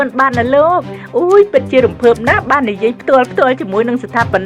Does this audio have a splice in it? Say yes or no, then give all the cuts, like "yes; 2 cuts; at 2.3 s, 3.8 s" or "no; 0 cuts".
no; 0 cuts